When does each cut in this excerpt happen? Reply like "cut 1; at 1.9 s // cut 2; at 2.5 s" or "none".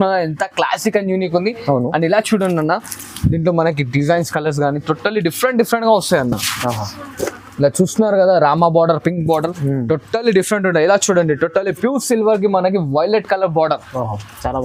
none